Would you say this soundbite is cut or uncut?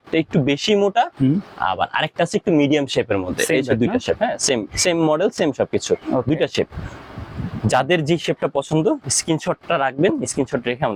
uncut